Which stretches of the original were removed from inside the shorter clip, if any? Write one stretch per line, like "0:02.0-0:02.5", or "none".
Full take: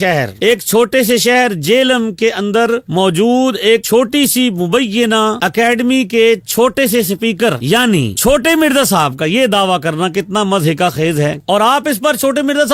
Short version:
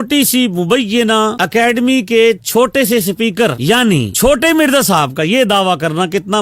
none